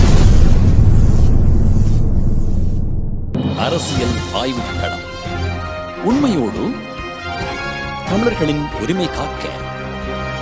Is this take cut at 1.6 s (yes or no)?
no